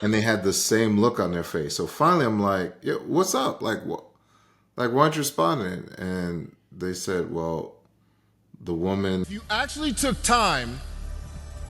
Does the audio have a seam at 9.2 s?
yes; 1 cut; at 9.2 s

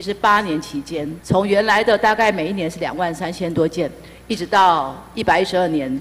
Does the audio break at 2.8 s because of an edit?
no; 1 cut; at 1.1 s

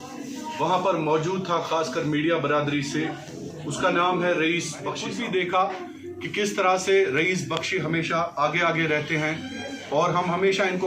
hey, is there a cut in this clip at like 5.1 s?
yes; 1 cut; at 5.1 s

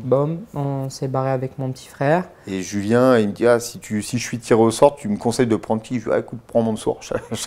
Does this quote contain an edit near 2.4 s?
yes; 1 cut; at 2.4 s

